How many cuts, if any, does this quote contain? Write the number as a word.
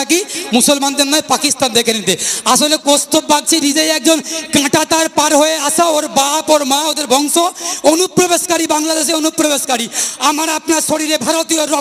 zero